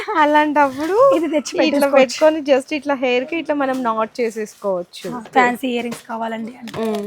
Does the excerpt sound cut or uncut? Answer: cut